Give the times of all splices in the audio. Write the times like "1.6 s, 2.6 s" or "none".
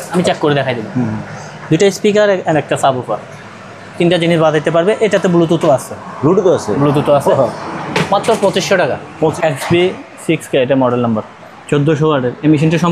9.3 s